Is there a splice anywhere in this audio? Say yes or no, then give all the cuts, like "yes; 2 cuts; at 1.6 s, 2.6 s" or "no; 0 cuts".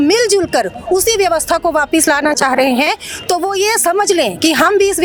no; 0 cuts